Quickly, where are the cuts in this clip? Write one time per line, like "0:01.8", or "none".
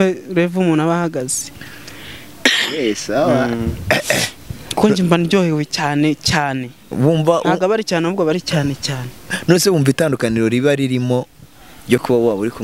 none